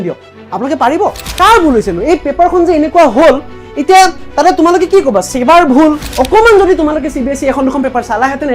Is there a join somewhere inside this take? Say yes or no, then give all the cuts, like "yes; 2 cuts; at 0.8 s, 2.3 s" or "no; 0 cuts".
yes; 2 cuts; at 1.2 s, 6.1 s